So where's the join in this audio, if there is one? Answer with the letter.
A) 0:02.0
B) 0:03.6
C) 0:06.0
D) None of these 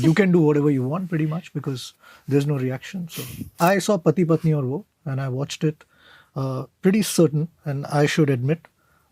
B